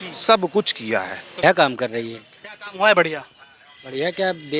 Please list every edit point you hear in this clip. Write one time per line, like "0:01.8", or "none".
0:01.4